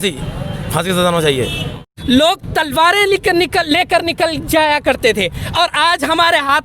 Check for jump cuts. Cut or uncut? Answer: cut